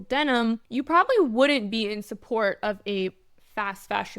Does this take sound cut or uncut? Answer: uncut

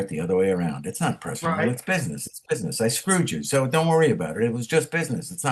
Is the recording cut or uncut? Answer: uncut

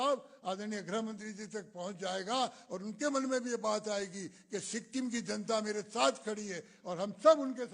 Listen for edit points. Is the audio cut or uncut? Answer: uncut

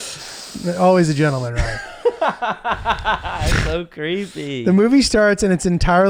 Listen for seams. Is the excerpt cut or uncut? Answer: uncut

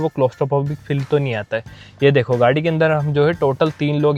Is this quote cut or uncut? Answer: uncut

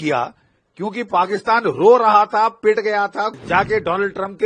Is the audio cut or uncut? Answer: cut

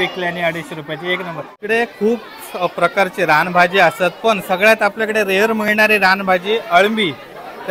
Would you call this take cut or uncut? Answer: cut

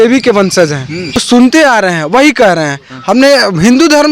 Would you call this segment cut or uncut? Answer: cut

